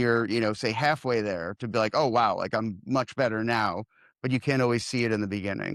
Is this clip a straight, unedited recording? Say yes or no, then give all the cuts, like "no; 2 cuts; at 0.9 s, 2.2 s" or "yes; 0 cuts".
yes; 0 cuts